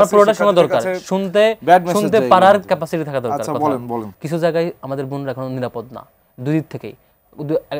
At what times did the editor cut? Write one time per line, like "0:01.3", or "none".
0:04.2